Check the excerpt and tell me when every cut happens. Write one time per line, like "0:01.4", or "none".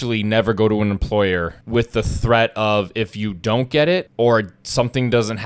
0:01.6
0:04.1